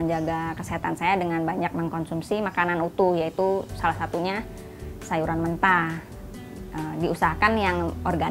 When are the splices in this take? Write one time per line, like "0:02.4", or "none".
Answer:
none